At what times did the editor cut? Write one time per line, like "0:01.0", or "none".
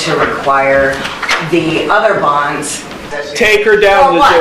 0:03.2

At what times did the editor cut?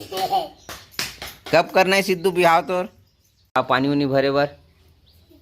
0:03.6

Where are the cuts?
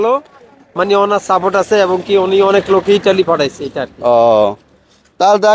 none

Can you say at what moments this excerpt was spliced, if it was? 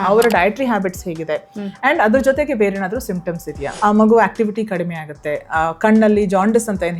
0:03.7

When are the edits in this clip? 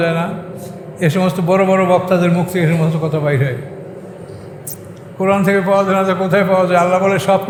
none

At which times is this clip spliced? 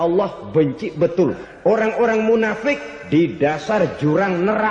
0:01.7

